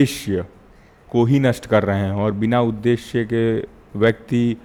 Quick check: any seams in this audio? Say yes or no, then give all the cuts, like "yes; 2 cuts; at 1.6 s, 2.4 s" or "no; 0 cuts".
no; 0 cuts